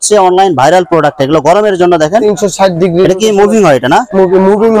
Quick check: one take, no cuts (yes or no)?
yes